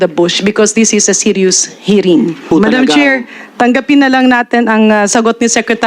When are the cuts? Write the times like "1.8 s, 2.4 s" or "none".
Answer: 2.5 s